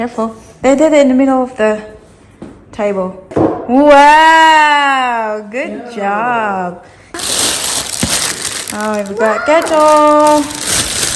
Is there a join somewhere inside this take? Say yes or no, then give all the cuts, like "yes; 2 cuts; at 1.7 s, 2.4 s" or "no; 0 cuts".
yes; 2 cuts; at 3.2 s, 7.2 s